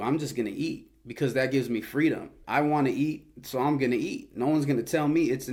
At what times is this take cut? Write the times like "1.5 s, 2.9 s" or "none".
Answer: none